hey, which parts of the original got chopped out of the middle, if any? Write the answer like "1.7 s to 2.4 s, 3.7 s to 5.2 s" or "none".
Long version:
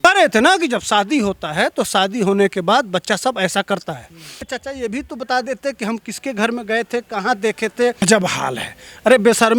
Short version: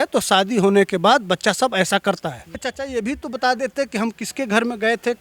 4.1 s to 4.3 s